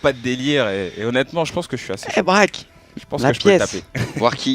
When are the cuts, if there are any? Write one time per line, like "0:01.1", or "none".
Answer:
0:03.6